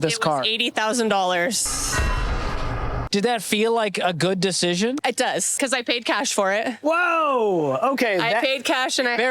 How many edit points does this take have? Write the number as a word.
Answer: zero